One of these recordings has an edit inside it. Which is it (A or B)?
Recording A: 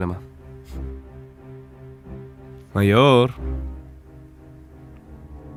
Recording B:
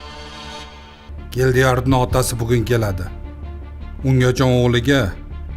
B